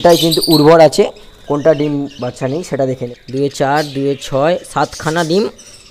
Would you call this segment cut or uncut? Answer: cut